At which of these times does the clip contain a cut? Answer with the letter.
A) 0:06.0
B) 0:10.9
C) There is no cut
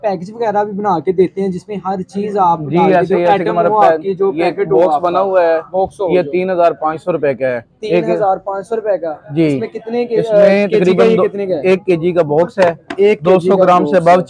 C